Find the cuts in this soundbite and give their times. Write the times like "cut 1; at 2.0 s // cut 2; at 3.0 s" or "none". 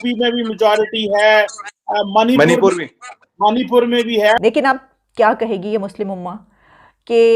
cut 1; at 4.4 s